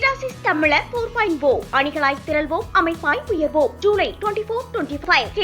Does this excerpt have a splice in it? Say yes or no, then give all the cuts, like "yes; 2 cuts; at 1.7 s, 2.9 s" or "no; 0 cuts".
no; 0 cuts